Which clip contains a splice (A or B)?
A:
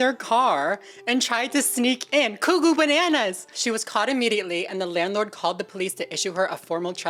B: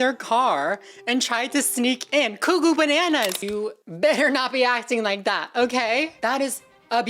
B